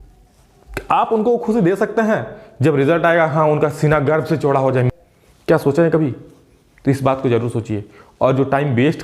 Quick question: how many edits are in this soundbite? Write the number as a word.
one